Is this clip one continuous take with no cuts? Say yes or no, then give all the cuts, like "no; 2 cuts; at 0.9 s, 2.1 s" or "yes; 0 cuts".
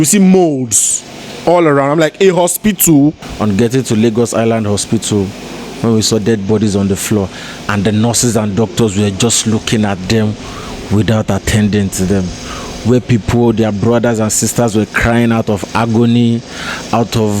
no; 1 cut; at 3.3 s